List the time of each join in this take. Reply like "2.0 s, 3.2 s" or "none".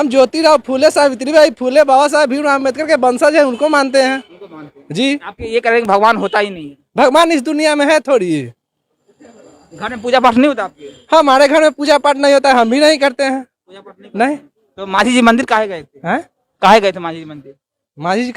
none